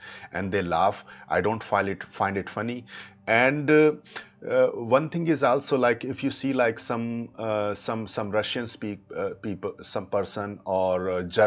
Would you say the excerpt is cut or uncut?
uncut